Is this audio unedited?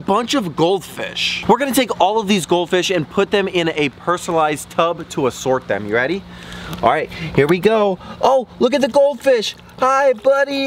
yes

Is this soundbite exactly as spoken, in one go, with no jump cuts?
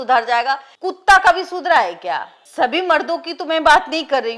yes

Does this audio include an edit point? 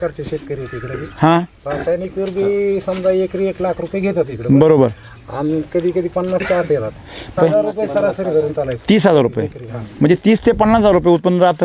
yes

